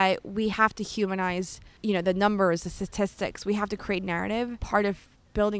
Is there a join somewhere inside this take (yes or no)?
yes